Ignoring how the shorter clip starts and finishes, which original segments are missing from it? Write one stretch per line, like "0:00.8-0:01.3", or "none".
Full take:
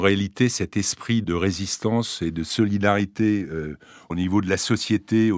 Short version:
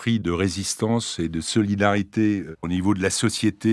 0:03.5-0:04.0